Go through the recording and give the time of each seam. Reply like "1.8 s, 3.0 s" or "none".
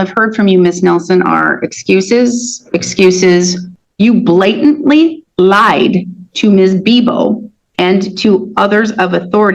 3.7 s